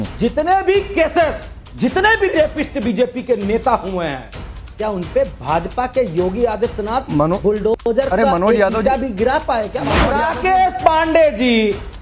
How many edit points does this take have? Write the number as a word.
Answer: one